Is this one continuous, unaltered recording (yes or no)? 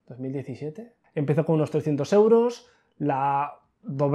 no